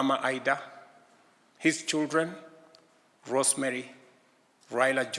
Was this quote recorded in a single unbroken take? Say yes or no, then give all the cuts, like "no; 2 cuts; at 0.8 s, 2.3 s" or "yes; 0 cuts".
yes; 0 cuts